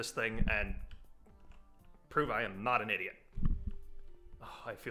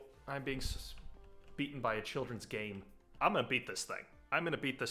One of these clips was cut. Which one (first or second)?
second